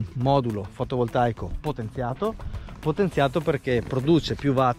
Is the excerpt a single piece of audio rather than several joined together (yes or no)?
yes